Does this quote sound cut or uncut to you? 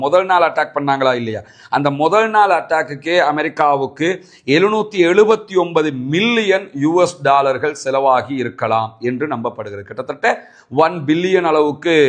uncut